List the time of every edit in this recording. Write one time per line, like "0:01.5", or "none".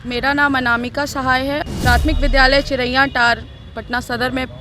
0:01.6